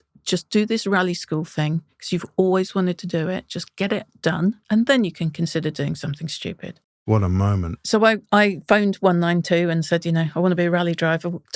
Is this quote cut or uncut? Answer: cut